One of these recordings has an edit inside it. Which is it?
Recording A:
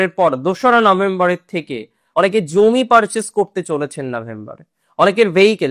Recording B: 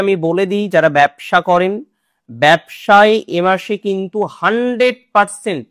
A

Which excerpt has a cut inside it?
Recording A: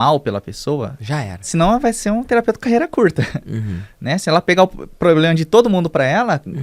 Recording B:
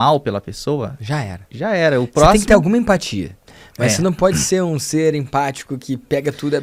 A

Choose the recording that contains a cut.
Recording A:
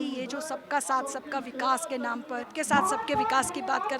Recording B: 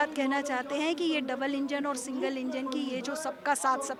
A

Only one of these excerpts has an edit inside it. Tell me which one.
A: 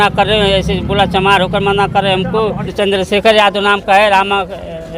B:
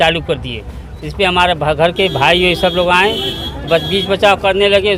A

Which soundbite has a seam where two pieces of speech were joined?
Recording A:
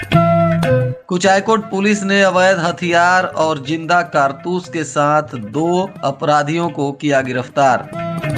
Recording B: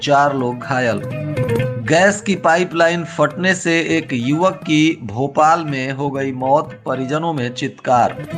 A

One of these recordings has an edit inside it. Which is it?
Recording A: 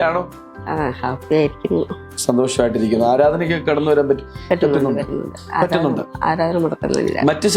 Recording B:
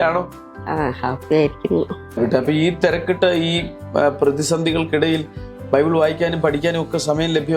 B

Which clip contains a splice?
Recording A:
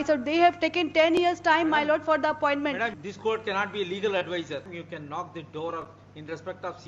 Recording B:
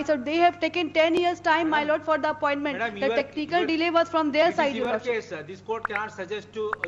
A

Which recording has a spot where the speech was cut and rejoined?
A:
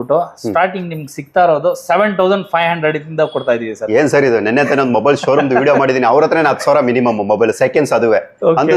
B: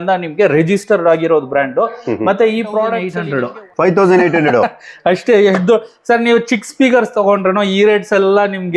B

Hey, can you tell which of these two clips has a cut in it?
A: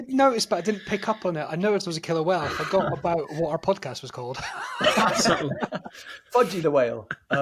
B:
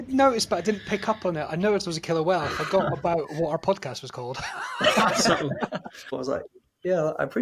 B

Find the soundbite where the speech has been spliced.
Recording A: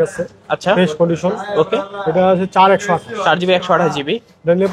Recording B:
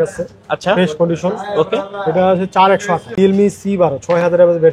B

